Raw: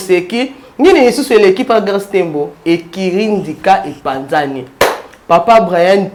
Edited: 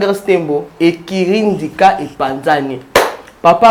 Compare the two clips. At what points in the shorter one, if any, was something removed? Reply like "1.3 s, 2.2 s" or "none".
none